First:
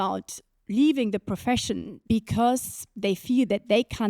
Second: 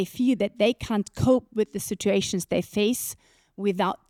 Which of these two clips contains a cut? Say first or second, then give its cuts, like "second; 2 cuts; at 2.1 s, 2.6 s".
first; 1 cut; at 1.9 s